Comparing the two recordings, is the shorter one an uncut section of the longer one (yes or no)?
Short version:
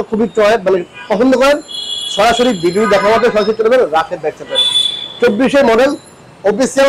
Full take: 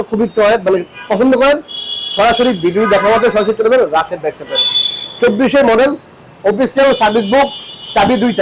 yes